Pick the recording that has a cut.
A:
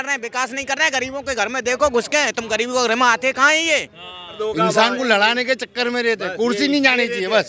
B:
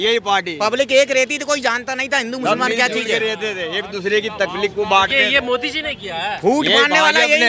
A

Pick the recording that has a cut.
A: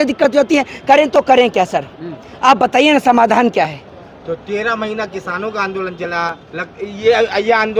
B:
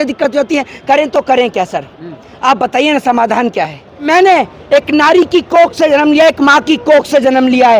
B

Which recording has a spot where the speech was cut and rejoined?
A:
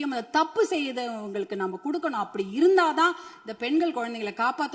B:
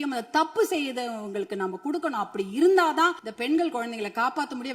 B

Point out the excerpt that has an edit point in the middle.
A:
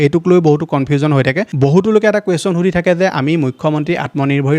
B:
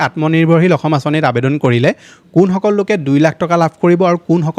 A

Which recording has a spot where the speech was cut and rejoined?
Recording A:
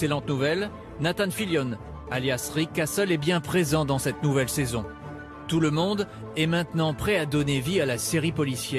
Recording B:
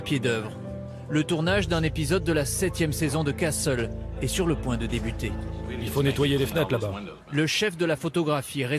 A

